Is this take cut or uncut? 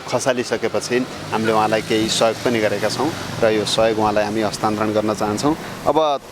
uncut